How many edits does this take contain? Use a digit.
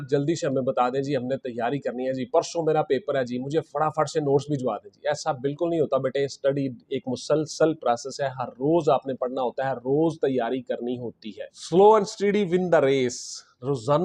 0